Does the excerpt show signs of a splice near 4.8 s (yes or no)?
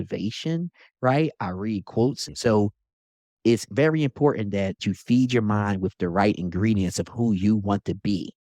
yes